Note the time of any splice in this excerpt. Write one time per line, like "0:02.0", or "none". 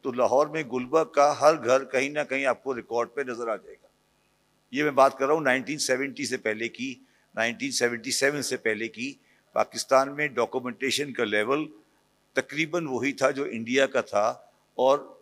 none